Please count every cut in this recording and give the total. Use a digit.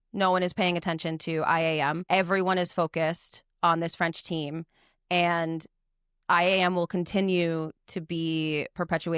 1